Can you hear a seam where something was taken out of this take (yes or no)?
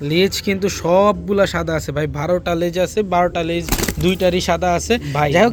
no